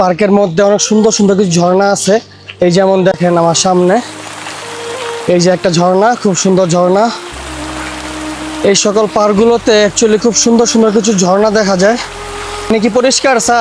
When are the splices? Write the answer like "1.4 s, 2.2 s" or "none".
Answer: 12.7 s